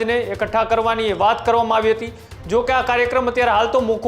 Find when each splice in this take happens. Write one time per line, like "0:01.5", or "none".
none